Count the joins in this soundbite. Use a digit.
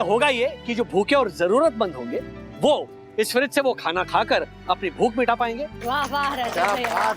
1